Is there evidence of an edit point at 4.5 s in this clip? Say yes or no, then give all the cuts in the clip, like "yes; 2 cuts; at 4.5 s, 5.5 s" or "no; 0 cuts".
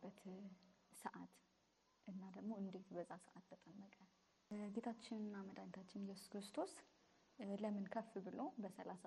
yes; 1 cut; at 4.5 s